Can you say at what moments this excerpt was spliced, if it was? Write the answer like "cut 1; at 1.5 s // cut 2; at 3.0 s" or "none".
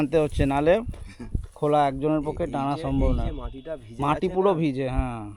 none